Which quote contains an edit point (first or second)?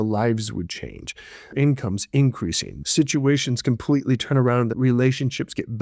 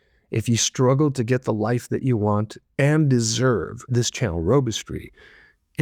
first